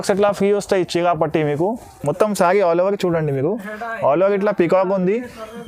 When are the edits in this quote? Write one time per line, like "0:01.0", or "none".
0:01.9